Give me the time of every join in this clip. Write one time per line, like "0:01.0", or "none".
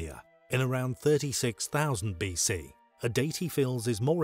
0:02.9